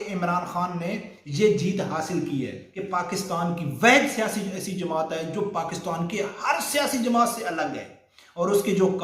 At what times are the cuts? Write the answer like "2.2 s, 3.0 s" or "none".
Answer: 2.6 s